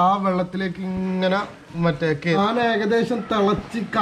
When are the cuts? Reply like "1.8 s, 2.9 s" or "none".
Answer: 2.4 s